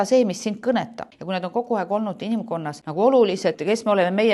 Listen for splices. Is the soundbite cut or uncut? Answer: cut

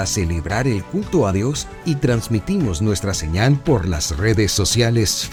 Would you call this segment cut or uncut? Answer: uncut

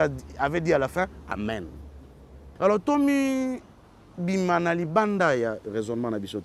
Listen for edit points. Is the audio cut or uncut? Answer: cut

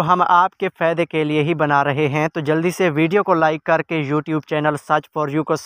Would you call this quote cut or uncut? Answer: uncut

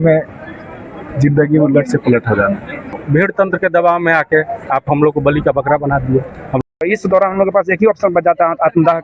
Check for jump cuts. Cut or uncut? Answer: cut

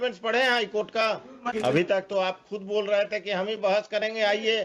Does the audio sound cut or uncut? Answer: cut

